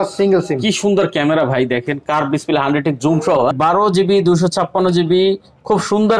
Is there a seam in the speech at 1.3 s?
no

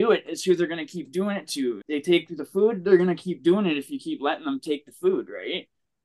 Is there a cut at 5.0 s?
no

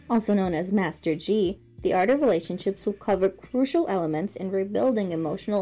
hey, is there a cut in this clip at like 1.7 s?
no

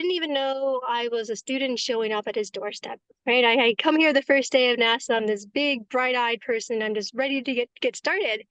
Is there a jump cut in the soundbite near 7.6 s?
no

